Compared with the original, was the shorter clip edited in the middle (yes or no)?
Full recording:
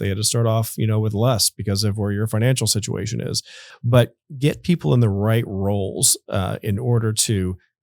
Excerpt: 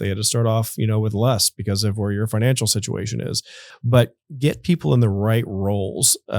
no